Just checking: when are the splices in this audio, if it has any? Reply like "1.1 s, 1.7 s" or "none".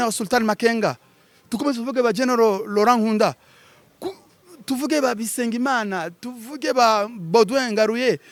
none